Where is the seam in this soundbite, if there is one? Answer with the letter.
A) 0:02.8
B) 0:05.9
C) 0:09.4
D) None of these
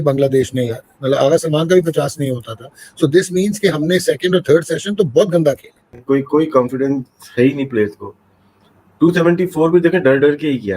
B